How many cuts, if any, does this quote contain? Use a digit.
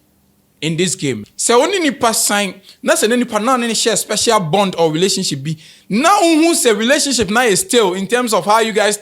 1